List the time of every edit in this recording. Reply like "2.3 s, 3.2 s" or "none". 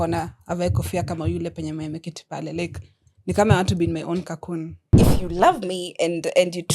4.9 s